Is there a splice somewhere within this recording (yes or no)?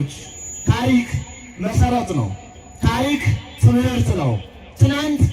no